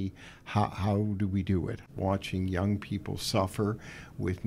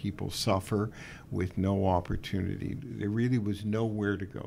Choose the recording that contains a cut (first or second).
first